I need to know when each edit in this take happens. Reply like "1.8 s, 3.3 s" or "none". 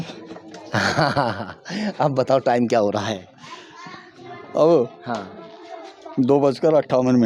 none